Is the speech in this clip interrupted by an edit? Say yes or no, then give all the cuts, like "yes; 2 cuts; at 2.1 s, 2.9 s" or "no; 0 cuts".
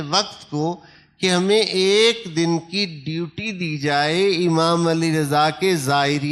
no; 0 cuts